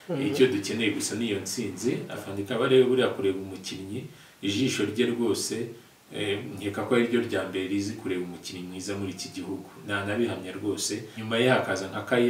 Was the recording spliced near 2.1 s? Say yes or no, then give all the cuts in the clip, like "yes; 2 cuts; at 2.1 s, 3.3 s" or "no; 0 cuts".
yes; 2 cuts; at 2.1 s, 11.2 s